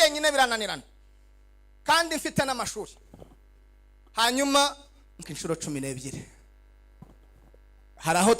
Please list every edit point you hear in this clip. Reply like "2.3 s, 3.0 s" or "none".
5.3 s